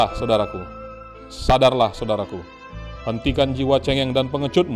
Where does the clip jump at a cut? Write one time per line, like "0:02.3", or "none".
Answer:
none

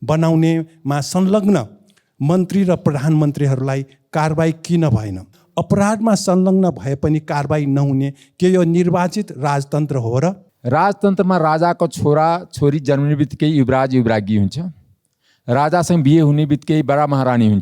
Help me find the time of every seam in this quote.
0:05.4
0:10.5

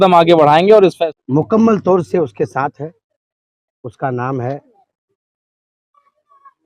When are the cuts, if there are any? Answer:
0:01.0

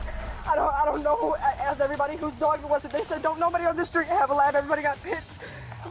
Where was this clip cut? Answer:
none

